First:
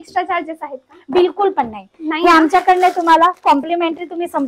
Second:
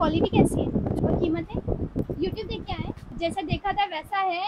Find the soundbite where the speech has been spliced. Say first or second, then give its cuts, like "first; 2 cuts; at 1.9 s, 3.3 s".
second; 3 cuts; at 1.0 s, 2.0 s, 3.1 s